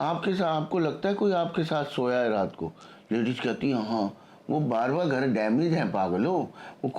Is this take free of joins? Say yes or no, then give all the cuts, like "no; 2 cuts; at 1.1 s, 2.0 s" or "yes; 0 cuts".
yes; 0 cuts